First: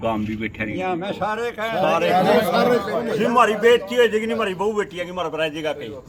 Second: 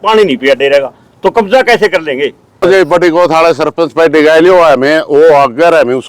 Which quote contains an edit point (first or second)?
second